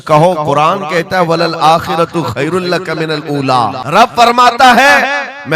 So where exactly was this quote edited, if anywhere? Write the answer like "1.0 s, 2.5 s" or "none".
3.8 s